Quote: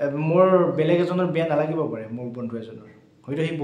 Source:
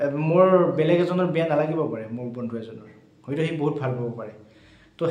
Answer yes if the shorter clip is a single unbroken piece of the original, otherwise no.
yes